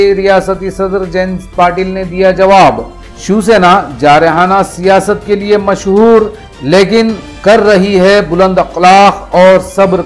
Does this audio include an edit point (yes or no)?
no